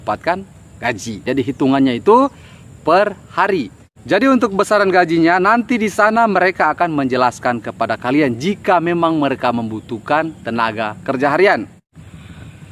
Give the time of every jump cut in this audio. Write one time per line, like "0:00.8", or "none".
0:01.2